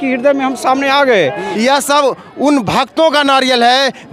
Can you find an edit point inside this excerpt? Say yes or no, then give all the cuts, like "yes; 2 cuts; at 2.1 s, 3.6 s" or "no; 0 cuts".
yes; 1 cut; at 1.5 s